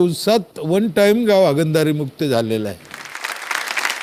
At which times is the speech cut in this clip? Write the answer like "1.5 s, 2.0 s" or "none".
none